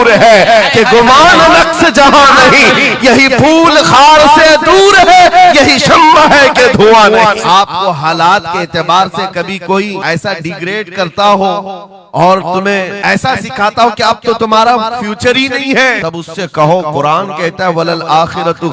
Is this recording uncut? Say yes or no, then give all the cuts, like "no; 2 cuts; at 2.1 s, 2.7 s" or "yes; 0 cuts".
no; 4 cuts; at 7.4 s, 10.0 s, 12.9 s, 16.0 s